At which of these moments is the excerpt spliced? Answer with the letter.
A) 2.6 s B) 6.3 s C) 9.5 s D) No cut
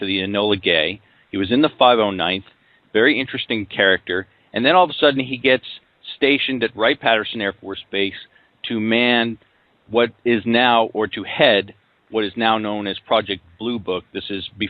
C